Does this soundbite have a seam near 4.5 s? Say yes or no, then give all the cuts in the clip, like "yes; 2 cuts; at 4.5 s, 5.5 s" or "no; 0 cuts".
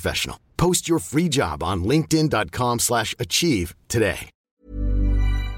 yes; 1 cut; at 4.5 s